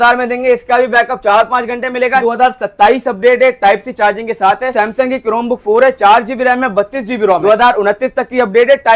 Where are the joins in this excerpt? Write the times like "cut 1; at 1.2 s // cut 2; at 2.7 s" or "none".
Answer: cut 1; at 2.2 s // cut 2; at 4.7 s // cut 3; at 7.4 s

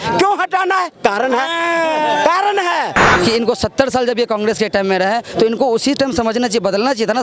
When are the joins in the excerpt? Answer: cut 1; at 3.1 s

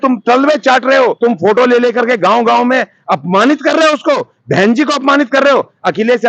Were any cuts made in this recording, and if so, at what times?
cut 1; at 1.2 s

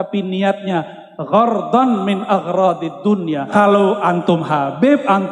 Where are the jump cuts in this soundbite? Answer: cut 1; at 3.5 s

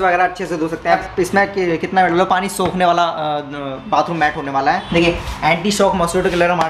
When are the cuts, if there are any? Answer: cut 1; at 1.0 s // cut 2; at 4.8 s

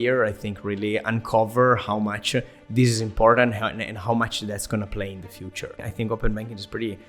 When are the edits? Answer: cut 1; at 5.9 s

